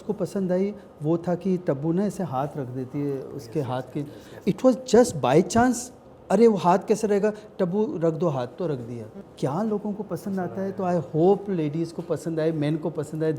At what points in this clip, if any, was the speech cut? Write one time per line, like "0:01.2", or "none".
0:04.3
0:09.2